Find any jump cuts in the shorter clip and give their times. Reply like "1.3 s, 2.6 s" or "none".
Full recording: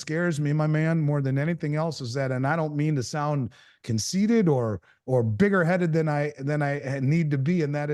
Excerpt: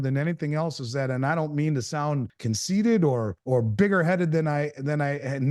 2.3 s, 3.3 s